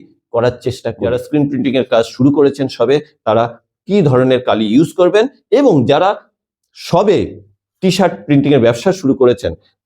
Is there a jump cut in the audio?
yes; 1 cut; at 0.9 s

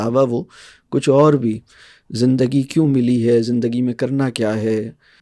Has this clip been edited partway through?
no; 0 cuts

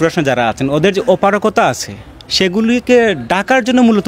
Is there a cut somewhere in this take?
no; 0 cuts

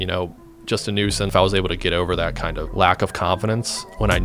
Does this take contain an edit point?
yes; 2 cuts; at 1.3 s, 2.6 s

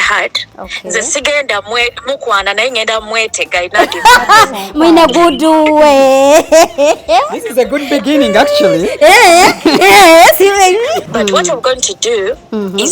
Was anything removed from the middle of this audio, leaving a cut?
yes; 1 cut; at 11.0 s

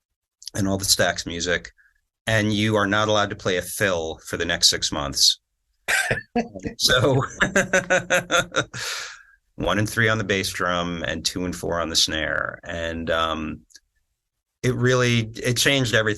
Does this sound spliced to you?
yes; 1 cut; at 9.2 s

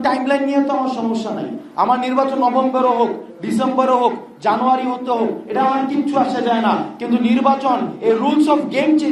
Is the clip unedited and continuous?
yes; 0 cuts

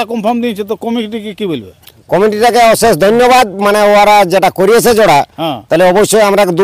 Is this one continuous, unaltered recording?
yes; 0 cuts

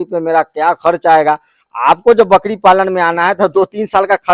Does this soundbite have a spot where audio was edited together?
no; 0 cuts

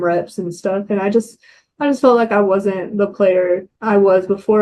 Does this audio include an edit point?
yes; 1 cut; at 3.7 s

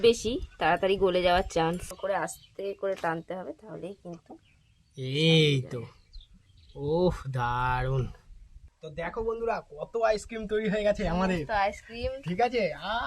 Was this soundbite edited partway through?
yes; 1 cut; at 1.9 s

